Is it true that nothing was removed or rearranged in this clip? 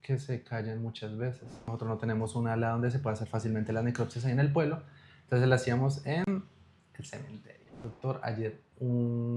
no; 2 cuts; at 1.8 s, 7.9 s

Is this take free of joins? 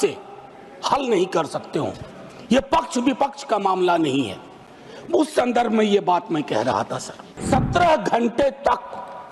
no; 1 cut; at 7.4 s

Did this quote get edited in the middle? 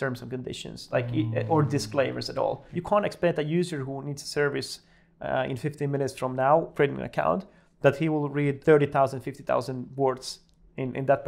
yes; 3 cuts; at 2.7 s, 6.7 s, 8.6 s

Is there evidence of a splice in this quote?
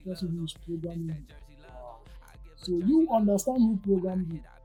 no; 0 cuts

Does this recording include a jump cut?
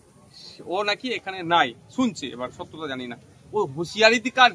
no; 0 cuts

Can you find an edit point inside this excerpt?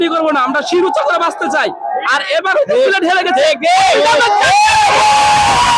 no; 0 cuts

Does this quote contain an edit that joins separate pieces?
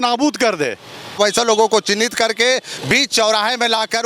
yes; 1 cut; at 1.2 s

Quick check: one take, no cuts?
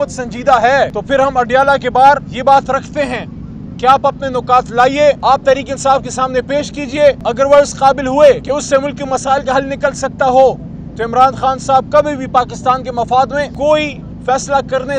no; 6 cuts; at 1.0 s, 2.3 s, 5.2 s, 7.2 s, 8.4 s, 13.5 s

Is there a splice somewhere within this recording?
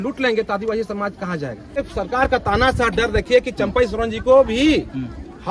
yes; 1 cut; at 1.8 s

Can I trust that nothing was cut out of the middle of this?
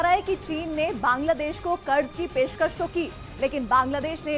yes; 0 cuts

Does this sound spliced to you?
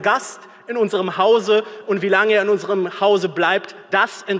no; 0 cuts

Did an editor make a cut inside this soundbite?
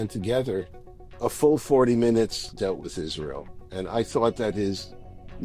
yes; 1 cut; at 2.5 s

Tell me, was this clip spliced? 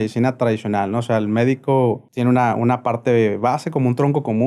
yes; 1 cut; at 2.1 s

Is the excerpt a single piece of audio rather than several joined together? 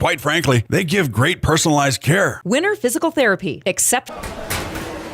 no; 1 cut; at 4.1 s

